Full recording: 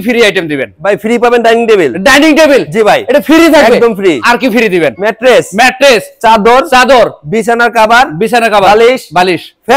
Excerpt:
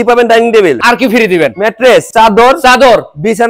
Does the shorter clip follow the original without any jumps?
no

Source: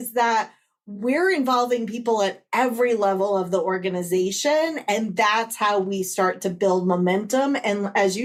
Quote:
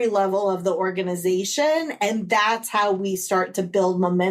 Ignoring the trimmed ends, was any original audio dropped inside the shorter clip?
no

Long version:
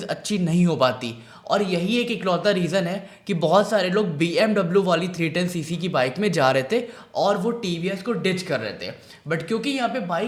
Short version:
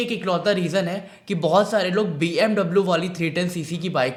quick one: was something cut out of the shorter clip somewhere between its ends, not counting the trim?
no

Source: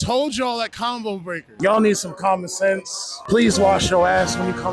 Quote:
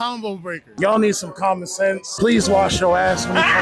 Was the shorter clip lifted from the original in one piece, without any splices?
no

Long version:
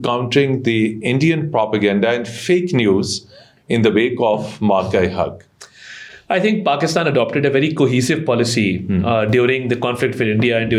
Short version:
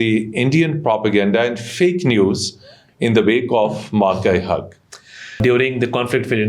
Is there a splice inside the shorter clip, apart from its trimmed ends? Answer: yes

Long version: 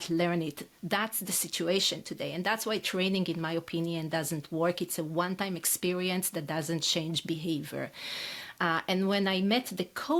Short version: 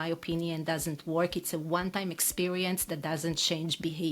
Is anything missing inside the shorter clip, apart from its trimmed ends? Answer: no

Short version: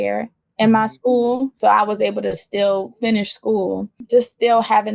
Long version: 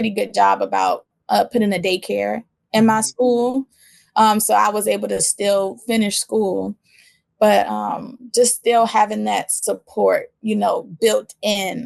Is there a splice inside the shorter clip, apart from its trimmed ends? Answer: yes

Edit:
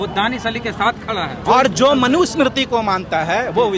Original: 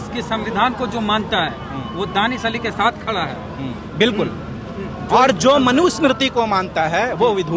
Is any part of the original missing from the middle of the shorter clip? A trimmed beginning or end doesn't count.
yes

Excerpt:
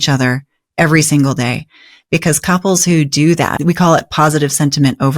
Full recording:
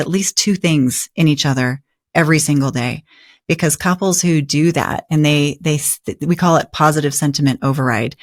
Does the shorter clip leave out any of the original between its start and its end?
yes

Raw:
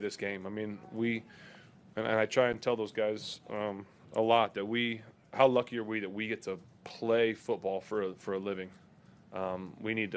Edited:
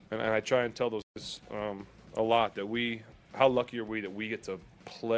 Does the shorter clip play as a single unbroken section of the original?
no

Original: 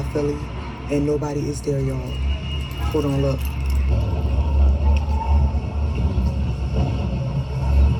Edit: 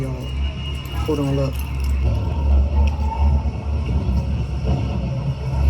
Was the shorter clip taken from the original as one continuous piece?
no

